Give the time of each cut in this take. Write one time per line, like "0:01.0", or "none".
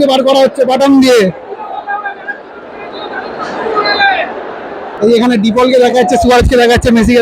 0:04.8